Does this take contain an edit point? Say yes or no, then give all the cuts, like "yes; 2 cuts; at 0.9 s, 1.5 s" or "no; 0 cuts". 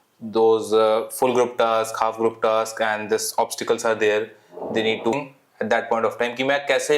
yes; 1 cut; at 5.1 s